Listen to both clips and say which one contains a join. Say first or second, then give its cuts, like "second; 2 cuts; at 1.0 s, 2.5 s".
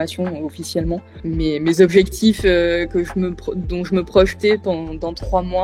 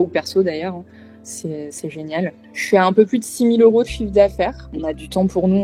second; 2 cuts; at 2.4 s, 4.6 s